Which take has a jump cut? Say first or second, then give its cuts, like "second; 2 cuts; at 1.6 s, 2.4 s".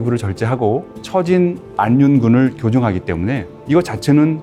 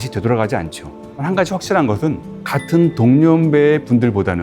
second; 1 cut; at 1.2 s